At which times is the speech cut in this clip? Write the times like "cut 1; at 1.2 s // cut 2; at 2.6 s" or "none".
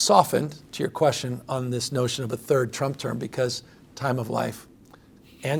none